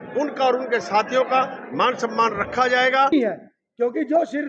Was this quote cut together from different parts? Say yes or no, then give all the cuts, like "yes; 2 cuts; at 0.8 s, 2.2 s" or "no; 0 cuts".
yes; 1 cut; at 3.1 s